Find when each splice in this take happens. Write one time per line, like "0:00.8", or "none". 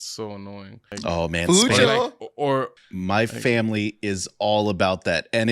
0:00.9
0:02.7